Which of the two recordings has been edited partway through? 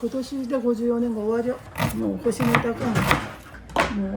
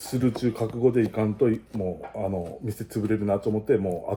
first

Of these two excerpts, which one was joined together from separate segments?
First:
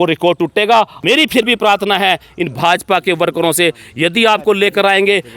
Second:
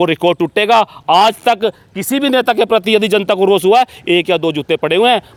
first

